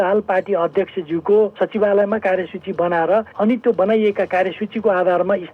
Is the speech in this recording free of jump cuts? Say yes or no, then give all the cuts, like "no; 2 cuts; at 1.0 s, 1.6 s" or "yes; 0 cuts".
no; 2 cuts; at 1.5 s, 3.3 s